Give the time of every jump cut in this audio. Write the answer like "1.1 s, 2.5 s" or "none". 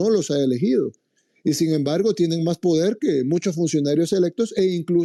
none